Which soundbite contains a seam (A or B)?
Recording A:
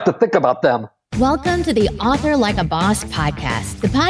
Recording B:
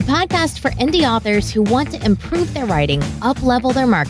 A